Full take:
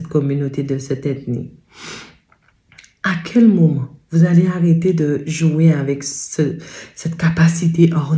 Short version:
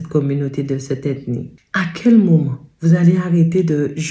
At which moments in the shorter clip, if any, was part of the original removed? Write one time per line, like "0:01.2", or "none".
0:01.6